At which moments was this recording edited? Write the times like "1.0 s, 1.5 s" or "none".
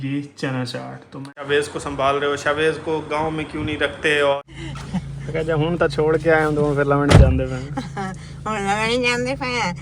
1.4 s, 4.4 s